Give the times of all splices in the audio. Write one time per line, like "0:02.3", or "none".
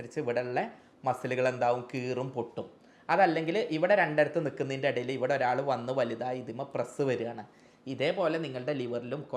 none